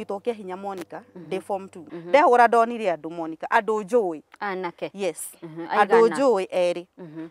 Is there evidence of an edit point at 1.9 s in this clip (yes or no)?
yes